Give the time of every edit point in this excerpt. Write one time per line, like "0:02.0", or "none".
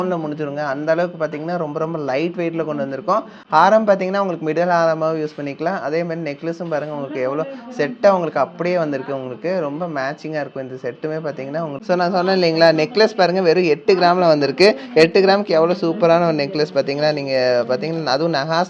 none